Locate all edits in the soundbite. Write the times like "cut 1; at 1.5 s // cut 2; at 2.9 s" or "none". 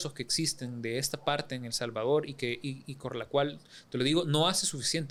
none